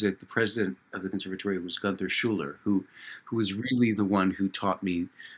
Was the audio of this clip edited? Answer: no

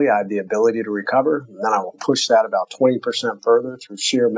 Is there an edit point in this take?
no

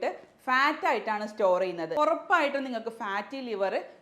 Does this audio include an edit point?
yes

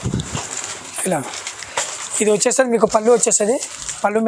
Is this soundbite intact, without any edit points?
yes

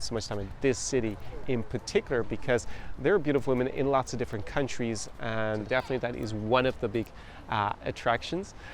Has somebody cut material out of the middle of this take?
yes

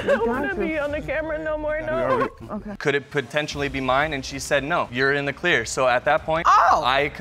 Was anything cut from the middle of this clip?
yes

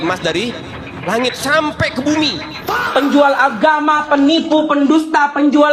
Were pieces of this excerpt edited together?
yes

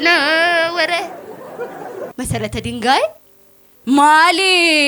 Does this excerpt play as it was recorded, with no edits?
no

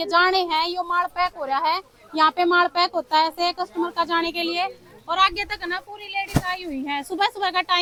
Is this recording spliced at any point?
no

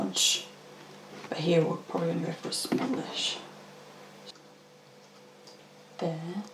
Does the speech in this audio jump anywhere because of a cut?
yes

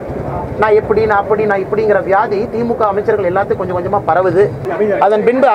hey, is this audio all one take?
no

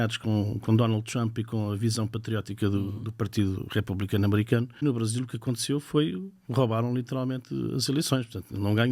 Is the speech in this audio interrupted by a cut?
yes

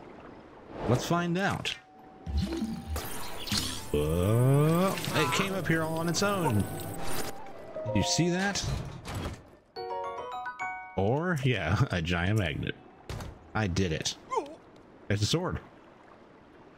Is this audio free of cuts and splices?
yes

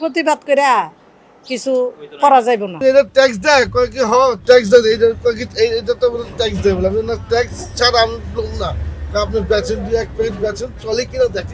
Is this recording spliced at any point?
yes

